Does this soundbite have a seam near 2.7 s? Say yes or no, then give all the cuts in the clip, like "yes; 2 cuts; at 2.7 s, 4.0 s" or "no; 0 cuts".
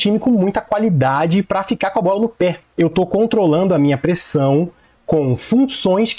yes; 1 cut; at 2.7 s